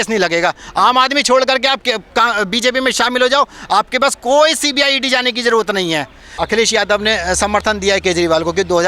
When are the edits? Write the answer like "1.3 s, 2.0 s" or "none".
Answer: 6.4 s